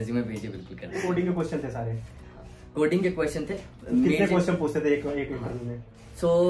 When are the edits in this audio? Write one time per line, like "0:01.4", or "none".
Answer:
0:00.9